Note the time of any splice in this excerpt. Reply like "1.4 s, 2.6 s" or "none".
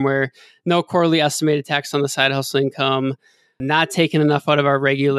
none